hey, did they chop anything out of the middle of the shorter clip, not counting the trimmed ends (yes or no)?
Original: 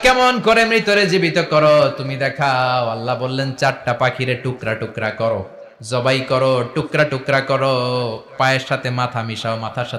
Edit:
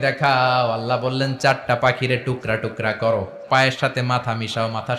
yes